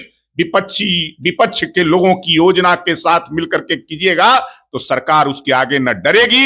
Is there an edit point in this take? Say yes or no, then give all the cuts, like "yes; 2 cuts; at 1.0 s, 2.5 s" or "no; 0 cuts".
no; 0 cuts